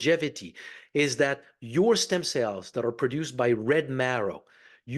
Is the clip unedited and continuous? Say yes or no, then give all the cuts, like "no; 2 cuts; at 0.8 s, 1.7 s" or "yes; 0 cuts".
yes; 0 cuts